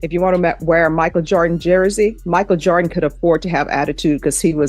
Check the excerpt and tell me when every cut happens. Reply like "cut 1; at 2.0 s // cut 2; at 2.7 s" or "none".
cut 1; at 2.2 s